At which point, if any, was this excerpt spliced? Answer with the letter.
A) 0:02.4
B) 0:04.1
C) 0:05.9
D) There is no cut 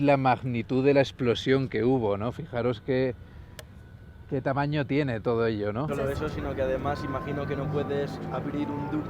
C